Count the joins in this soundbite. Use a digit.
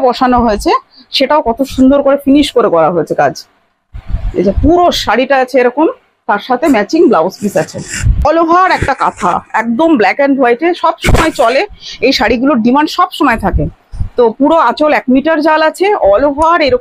1